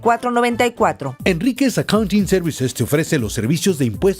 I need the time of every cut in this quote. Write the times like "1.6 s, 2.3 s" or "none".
1.1 s